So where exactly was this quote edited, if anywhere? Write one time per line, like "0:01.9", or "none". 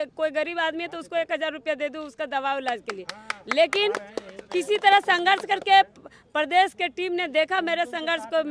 none